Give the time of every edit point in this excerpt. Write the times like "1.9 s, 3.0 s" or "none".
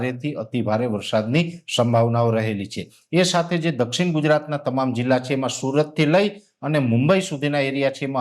none